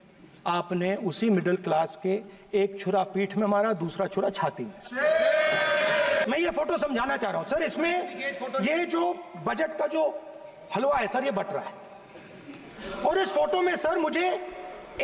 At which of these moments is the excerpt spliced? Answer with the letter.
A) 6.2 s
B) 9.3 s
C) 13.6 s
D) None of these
A